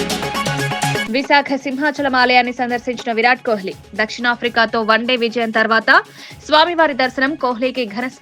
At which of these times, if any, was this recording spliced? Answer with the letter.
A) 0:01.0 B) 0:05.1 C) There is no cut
A